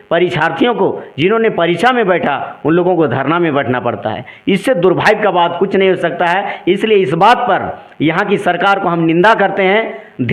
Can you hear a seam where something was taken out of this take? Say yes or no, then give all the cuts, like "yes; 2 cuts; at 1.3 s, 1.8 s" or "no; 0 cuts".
no; 0 cuts